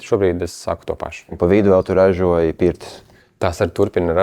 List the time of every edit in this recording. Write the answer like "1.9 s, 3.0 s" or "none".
1.4 s